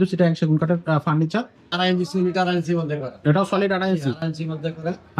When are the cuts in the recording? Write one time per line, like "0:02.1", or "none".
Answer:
0:01.6

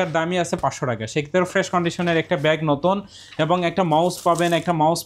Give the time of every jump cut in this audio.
none

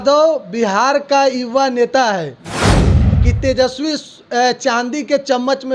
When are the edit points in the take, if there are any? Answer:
0:02.9

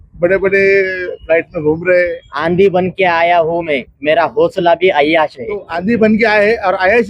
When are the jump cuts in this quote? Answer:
0:02.3
0:05.7

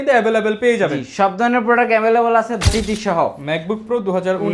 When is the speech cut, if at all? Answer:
0:02.7

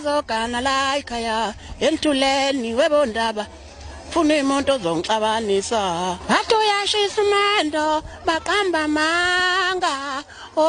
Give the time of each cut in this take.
0:06.2

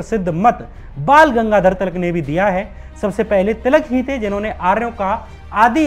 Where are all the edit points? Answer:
none

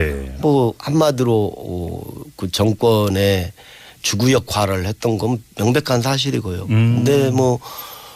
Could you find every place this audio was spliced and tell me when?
0:04.8

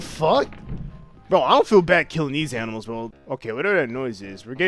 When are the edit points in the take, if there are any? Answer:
0:03.1

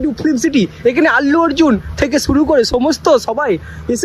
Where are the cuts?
none

